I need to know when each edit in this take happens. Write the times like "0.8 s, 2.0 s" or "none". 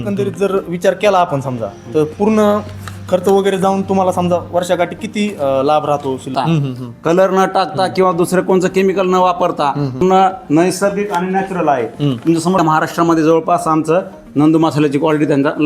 6.3 s, 10.0 s, 12.6 s